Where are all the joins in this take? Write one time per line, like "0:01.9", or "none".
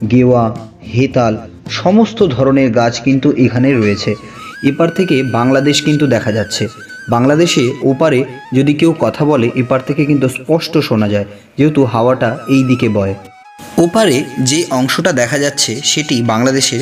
0:04.4

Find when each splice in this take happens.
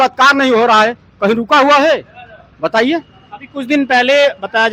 none

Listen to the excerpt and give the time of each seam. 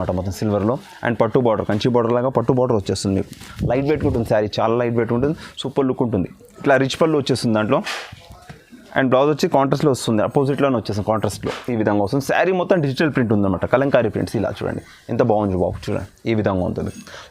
0:06.5

